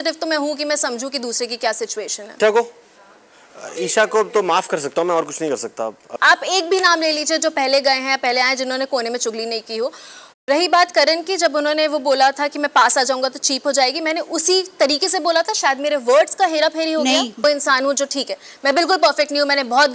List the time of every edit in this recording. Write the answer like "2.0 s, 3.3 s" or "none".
2.3 s, 6.1 s, 10.3 s, 17.4 s